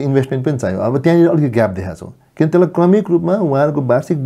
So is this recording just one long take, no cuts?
yes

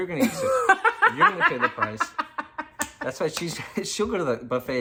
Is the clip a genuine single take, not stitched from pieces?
yes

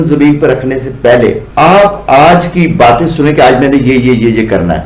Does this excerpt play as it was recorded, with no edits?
no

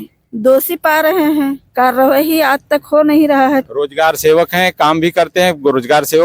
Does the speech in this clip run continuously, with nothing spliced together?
no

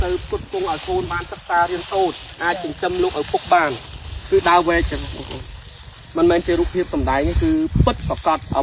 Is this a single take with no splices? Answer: yes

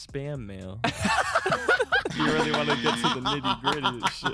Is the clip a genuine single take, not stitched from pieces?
yes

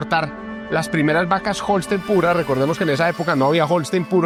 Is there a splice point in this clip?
no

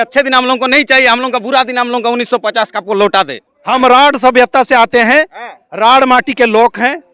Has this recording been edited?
yes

